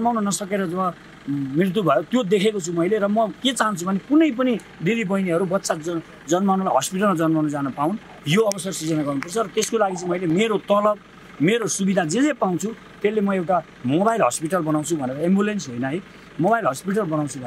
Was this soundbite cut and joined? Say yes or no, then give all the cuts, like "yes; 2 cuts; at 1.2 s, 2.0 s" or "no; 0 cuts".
no; 0 cuts